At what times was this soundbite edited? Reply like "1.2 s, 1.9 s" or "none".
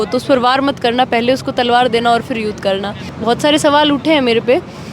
3.1 s